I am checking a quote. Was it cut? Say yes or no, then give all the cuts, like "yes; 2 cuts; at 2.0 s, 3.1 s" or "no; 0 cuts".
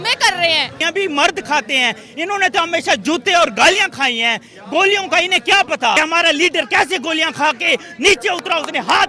yes; 2 cuts; at 0.8 s, 6.0 s